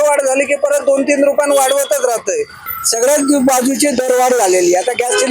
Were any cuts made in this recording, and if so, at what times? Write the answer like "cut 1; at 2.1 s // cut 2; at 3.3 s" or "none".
cut 1; at 2.7 s